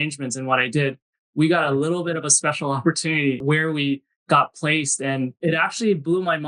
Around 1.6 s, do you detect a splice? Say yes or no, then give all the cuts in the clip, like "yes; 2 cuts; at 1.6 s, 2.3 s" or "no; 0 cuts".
no; 2 cuts; at 3.4 s, 5.4 s